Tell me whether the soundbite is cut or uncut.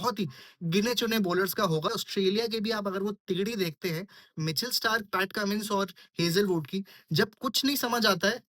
cut